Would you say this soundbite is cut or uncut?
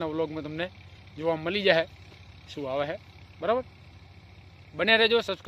uncut